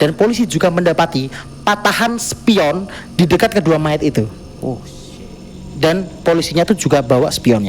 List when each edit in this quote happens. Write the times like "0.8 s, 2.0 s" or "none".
5.5 s